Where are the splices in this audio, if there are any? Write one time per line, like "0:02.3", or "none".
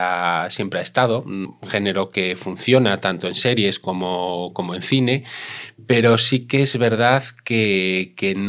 0:01.5